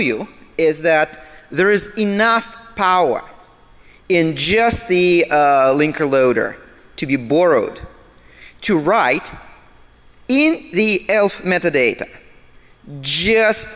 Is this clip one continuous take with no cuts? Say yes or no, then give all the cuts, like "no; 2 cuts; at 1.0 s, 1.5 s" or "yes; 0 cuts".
no; 1 cut; at 12.7 s